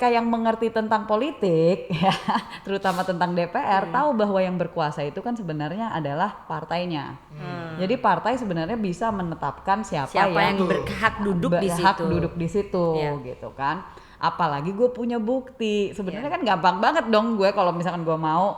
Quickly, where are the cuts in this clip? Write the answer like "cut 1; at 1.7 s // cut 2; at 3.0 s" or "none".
none